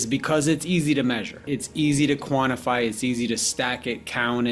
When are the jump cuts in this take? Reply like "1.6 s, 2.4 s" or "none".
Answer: 1.4 s